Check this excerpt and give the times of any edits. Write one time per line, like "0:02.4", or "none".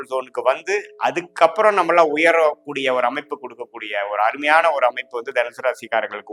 none